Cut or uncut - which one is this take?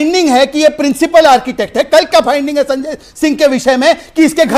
uncut